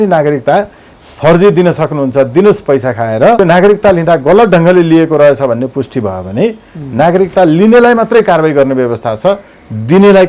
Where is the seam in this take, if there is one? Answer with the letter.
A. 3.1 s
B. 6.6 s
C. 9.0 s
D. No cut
D